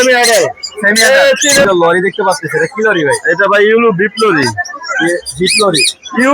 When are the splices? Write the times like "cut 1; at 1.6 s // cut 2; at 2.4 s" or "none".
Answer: cut 1; at 1.7 s